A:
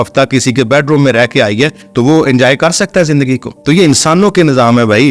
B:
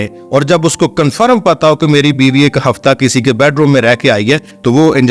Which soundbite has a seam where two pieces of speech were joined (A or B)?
A